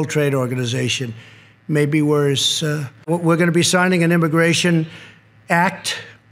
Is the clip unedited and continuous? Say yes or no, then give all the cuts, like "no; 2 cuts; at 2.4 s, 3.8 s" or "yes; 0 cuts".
no; 1 cut; at 2.9 s